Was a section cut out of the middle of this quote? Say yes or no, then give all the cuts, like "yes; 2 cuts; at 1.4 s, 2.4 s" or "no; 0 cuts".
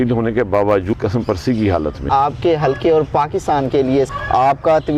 yes; 3 cuts; at 0.9 s, 2.0 s, 4.1 s